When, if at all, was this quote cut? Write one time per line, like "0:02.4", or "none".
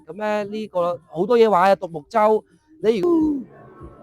0:03.0